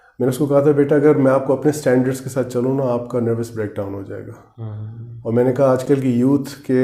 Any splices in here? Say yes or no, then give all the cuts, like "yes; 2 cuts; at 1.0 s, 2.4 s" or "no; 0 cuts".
no; 0 cuts